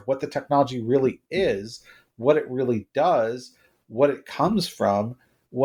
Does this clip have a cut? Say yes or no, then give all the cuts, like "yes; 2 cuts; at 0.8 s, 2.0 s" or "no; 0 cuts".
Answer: no; 0 cuts